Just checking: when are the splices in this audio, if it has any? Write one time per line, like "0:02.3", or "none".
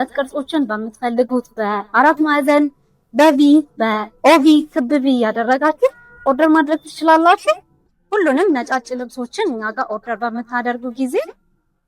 0:07.9